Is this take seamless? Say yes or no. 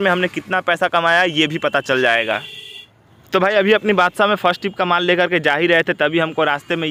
yes